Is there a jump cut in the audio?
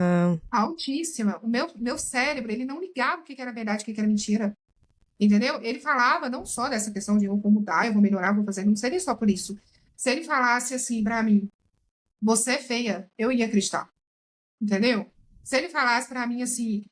no; 0 cuts

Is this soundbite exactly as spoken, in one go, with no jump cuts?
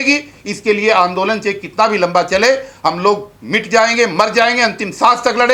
yes; 0 cuts

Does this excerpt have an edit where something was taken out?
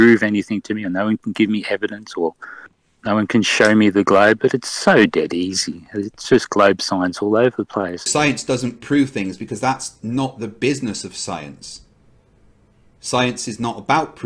yes; 1 cut; at 8.0 s

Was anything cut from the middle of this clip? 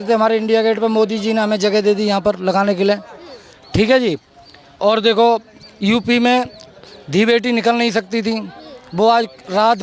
no; 0 cuts

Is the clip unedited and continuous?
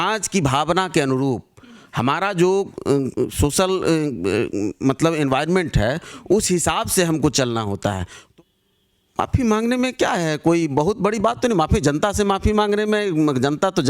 no; 1 cut; at 8.2 s

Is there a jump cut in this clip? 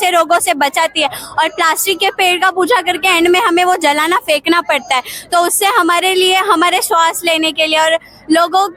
no; 0 cuts

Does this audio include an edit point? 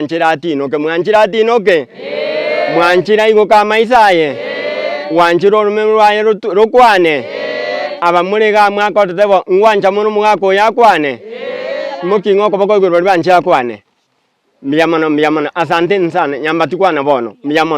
no; 0 cuts

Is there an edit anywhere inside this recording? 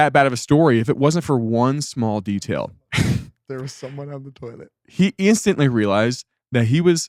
no; 0 cuts

